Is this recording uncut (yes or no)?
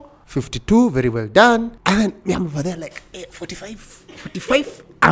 yes